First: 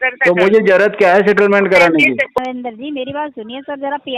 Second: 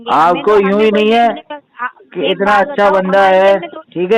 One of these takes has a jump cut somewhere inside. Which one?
first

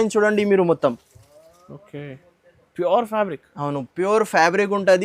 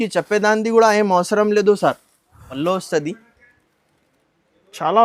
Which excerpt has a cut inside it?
second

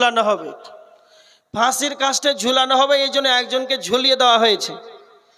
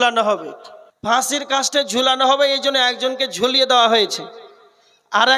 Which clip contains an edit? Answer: second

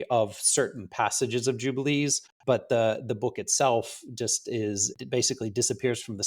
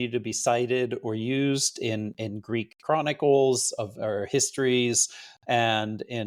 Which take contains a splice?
first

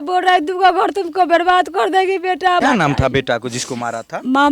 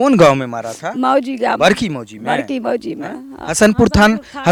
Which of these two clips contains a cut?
first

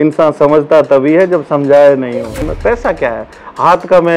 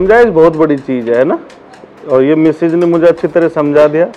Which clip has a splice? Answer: first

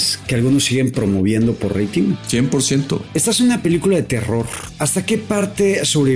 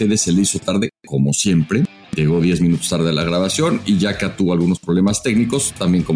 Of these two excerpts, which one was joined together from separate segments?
first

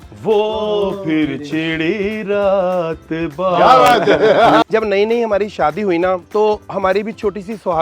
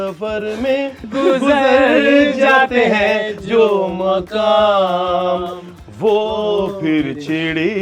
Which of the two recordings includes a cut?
first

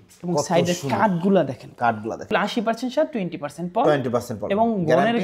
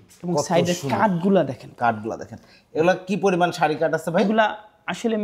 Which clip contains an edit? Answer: first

